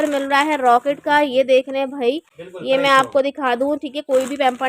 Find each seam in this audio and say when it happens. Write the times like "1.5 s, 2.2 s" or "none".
none